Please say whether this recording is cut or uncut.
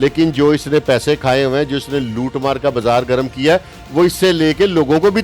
uncut